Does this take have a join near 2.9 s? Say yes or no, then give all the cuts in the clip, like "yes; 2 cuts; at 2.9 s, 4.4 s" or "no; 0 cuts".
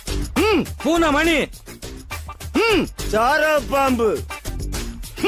no; 0 cuts